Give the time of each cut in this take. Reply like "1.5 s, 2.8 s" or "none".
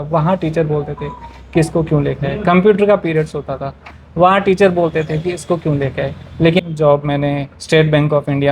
6.6 s